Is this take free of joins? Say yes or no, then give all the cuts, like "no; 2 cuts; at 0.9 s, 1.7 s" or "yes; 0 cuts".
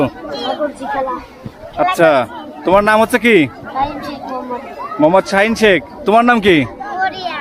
yes; 0 cuts